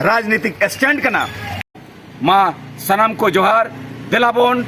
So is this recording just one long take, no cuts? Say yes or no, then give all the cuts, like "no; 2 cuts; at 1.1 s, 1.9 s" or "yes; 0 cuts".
no; 1 cut; at 1.7 s